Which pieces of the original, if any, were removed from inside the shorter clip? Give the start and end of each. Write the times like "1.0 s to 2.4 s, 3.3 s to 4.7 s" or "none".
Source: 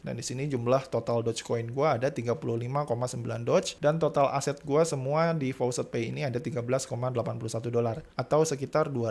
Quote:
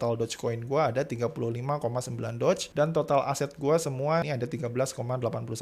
5.3 s to 6.2 s